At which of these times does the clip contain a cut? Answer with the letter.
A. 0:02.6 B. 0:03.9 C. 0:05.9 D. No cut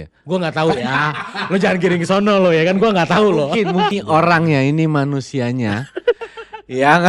B